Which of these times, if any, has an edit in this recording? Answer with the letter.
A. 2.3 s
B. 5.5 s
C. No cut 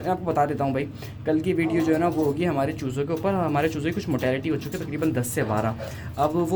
C